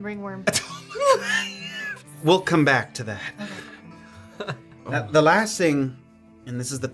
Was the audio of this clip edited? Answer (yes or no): no